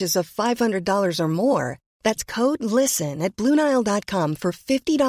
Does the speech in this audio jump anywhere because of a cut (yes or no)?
no